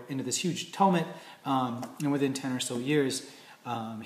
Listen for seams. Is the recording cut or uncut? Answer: cut